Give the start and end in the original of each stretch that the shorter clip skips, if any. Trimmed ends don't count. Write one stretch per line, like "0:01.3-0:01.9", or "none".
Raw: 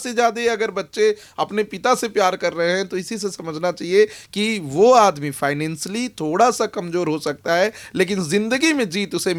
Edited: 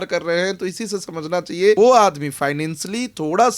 0:04.1-0:04.8